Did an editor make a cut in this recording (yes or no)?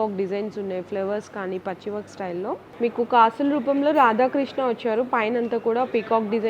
yes